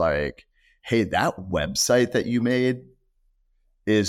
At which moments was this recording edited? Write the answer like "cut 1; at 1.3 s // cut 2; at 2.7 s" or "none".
none

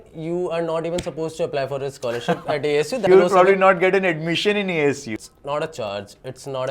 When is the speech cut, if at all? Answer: cut 1; at 3.0 s // cut 2; at 5.1 s

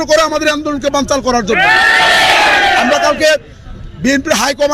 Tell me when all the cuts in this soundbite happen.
none

